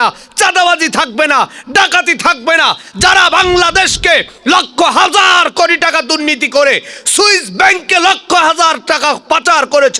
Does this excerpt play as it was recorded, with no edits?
yes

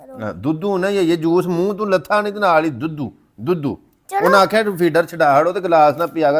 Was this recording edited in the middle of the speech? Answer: no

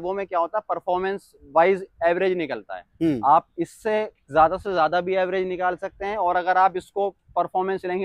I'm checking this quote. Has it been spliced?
no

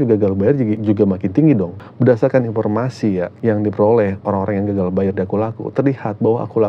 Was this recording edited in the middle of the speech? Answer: yes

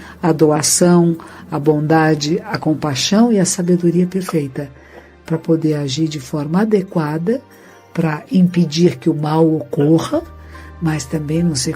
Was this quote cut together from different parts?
no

